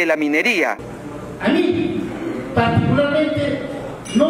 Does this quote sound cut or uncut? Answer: cut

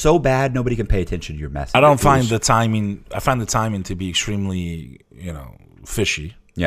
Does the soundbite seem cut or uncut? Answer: cut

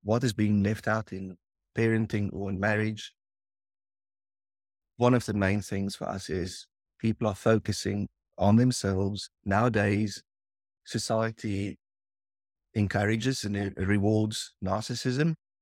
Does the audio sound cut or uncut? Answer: uncut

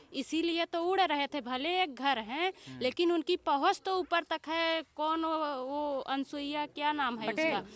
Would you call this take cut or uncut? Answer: uncut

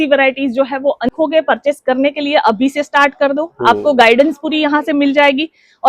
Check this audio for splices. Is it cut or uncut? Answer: cut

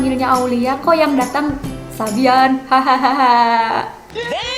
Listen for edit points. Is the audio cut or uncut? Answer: uncut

